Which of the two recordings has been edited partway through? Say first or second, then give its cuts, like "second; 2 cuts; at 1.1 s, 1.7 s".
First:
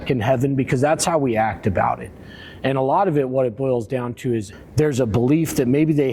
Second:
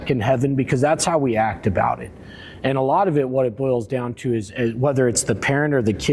first; 1 cut; at 4.5 s